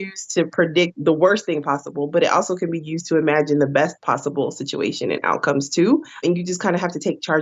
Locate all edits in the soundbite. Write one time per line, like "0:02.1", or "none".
0:04.0
0:06.2